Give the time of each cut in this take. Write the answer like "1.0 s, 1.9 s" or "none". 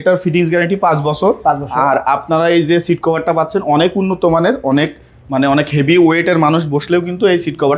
none